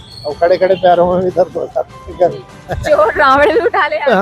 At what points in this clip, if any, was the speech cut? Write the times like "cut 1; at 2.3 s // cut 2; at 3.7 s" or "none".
cut 1; at 2.5 s